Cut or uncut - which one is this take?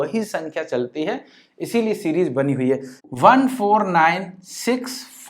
cut